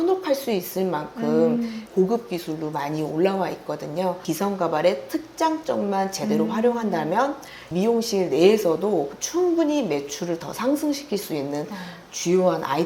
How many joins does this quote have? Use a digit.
3